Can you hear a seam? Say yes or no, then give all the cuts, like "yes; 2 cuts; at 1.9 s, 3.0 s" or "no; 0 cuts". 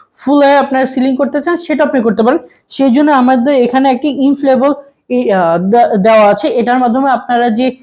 no; 0 cuts